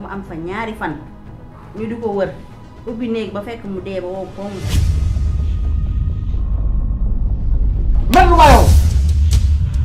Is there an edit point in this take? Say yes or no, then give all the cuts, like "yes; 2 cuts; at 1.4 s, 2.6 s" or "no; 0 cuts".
no; 0 cuts